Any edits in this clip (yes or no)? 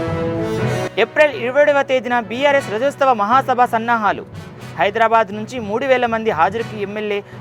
no